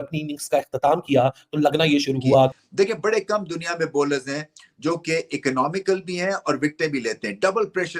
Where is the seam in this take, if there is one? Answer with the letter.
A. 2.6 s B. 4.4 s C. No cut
A